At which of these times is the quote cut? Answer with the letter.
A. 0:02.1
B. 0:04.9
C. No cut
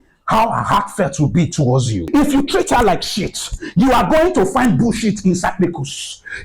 A